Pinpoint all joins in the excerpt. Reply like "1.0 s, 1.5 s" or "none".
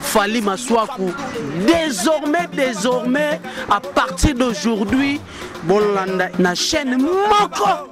6.3 s